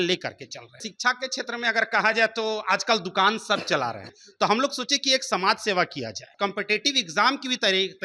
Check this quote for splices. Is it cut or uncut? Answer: cut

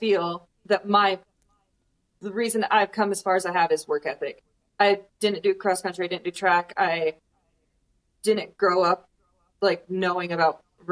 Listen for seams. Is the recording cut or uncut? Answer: uncut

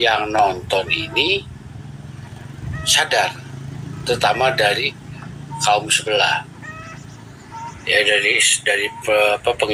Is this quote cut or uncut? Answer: uncut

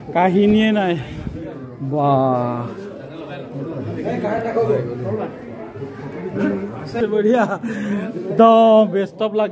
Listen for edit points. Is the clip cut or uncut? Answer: uncut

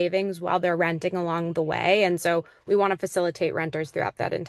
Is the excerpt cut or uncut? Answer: uncut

